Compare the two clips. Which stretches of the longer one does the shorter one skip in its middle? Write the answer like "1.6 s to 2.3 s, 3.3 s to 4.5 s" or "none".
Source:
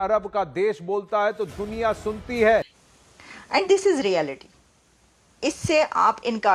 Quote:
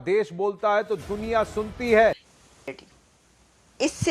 3.3 s to 4.4 s